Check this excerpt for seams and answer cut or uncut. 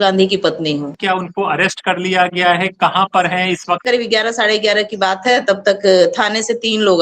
cut